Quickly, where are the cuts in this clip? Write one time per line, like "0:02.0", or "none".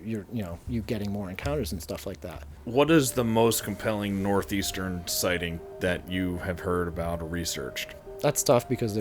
0:02.5
0:08.0